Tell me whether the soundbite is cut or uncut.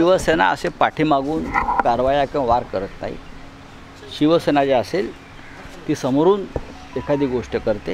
uncut